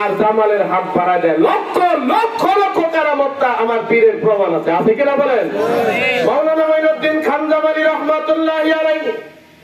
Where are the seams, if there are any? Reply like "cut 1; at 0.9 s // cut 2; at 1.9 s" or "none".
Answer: none

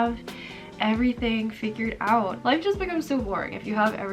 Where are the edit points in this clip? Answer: cut 1; at 2.4 s

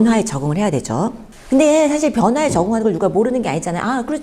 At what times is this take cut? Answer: cut 1; at 1.3 s

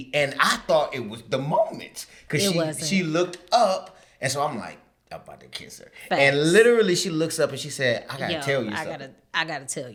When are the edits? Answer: none

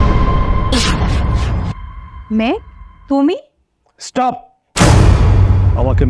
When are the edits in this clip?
cut 1; at 1.9 s

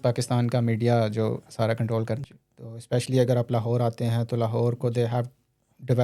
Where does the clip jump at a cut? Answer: cut 1; at 2.2 s

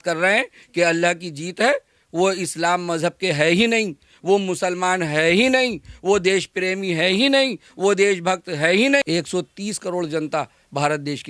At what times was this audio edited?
cut 1; at 9.0 s

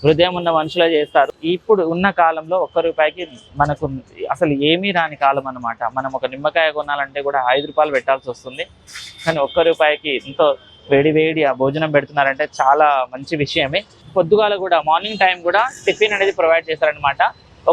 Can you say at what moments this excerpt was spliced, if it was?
cut 1; at 1.3 s // cut 2; at 14.0 s

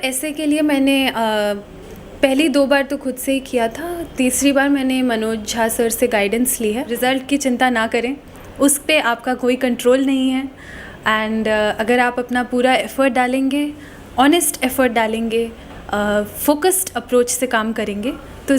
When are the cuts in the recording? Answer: cut 1; at 6.9 s

